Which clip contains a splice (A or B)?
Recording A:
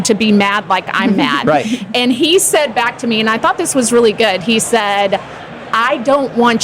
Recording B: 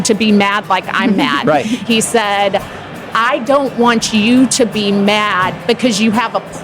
B